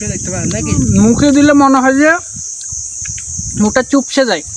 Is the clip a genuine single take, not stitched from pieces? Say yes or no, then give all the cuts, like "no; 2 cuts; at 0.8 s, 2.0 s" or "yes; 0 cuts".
yes; 0 cuts